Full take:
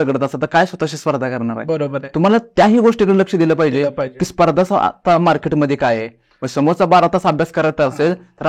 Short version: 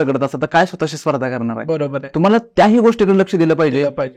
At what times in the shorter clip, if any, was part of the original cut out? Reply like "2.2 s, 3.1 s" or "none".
none